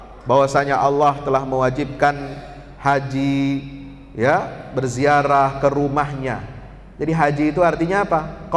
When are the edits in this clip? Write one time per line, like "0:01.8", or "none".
none